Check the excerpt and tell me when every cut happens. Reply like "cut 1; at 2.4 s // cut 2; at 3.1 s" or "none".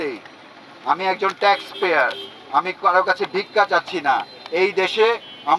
none